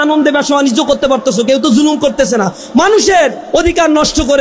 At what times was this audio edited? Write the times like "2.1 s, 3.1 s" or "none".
3.4 s